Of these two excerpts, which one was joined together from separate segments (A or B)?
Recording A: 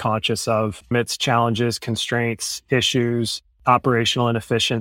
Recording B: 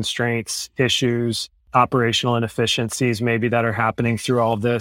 A